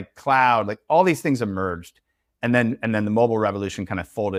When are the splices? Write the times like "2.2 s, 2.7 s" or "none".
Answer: none